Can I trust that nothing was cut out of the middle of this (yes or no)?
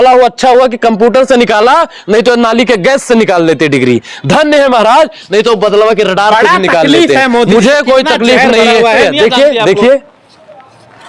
no